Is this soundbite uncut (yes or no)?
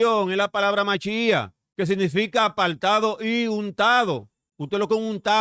no